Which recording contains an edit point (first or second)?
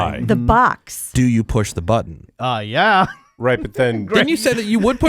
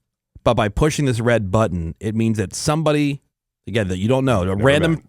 first